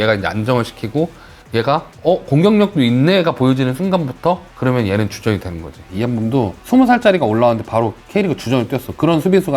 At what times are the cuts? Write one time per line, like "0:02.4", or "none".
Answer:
0:05.8